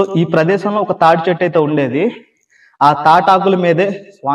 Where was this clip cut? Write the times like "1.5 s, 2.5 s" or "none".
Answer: none